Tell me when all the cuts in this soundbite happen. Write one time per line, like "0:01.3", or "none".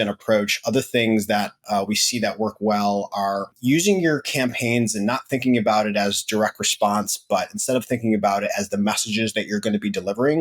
0:03.5

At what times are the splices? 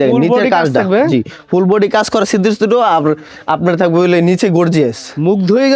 none

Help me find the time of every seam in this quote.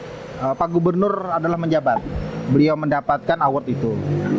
none

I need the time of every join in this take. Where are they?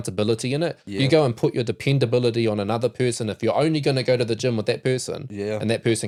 none

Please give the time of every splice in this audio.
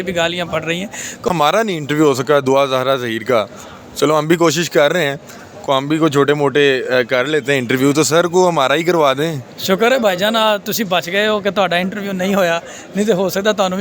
0:01.3

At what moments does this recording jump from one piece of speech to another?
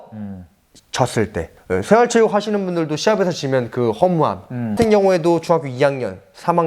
0:04.7

